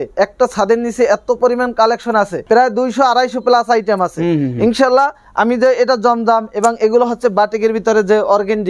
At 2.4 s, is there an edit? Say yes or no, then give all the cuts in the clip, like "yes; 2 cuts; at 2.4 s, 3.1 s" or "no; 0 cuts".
no; 0 cuts